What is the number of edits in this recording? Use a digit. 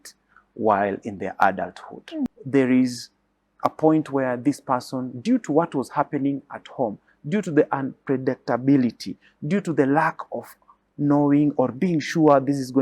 1